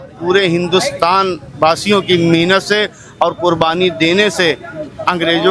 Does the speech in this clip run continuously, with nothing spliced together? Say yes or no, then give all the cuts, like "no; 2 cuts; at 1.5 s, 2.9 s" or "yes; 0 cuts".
yes; 0 cuts